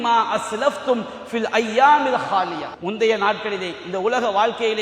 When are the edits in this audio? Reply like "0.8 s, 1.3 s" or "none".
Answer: 2.7 s